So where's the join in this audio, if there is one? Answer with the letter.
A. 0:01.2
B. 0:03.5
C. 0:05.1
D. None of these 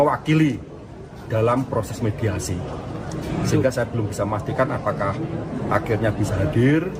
D